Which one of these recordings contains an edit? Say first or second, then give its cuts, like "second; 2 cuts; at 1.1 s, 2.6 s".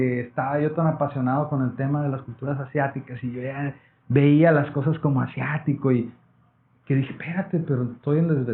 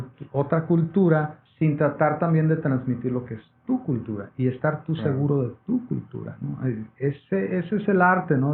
second; 1 cut; at 1.1 s